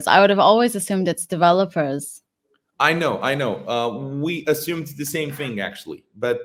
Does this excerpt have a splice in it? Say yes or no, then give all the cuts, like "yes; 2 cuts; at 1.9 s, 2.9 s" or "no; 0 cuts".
no; 0 cuts